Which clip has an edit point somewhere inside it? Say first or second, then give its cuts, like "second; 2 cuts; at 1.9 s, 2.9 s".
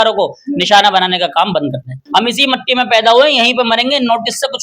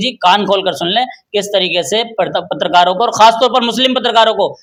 first; 1 cut; at 2.0 s